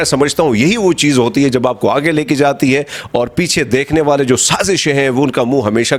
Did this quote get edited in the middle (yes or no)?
no